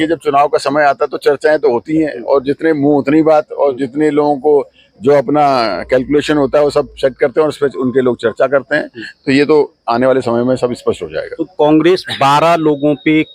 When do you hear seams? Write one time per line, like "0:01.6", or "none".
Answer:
none